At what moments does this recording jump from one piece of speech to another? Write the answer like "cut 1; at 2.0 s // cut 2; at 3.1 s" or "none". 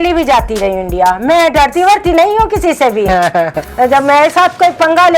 cut 1; at 3.6 s